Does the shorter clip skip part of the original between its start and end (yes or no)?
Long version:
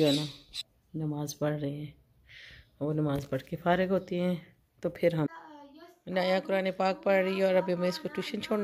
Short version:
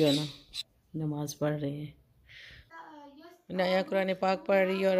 yes